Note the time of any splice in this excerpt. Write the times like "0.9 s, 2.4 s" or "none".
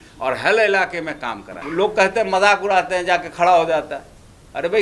1.6 s